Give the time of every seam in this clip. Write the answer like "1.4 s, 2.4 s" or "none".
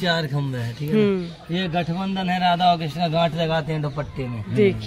none